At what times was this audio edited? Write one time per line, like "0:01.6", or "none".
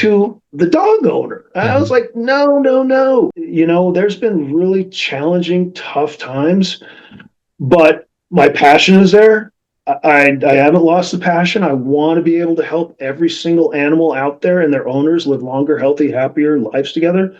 0:03.4